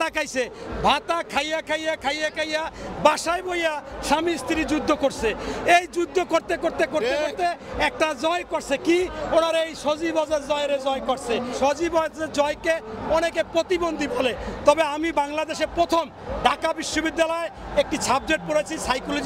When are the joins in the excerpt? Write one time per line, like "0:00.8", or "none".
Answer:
0:11.5